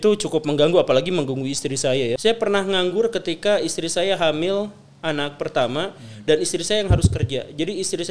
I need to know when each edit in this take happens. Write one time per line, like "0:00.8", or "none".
0:02.2